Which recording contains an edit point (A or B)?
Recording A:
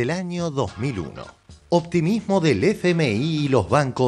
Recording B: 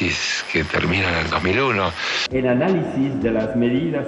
B